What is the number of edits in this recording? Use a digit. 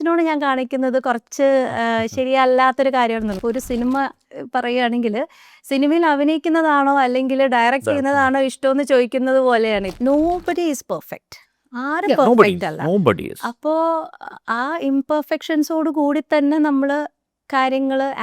2